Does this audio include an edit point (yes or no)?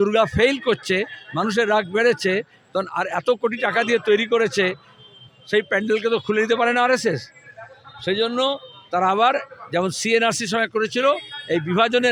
no